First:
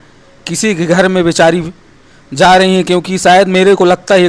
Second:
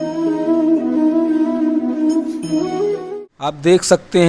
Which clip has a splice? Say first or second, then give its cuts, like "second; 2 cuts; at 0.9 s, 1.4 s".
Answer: second; 1 cut; at 3.1 s